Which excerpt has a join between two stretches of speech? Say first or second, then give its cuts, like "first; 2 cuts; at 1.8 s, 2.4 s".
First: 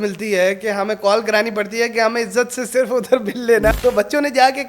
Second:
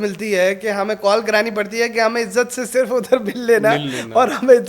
first; 1 cut; at 3.7 s